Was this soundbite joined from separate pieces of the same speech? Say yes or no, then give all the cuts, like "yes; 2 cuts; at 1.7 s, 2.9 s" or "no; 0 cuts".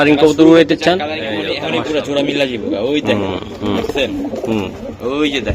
yes; 1 cut; at 1.5 s